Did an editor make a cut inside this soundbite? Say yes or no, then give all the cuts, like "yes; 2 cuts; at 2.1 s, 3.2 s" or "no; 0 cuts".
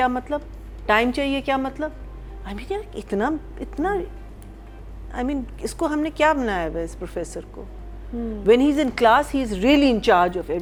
no; 0 cuts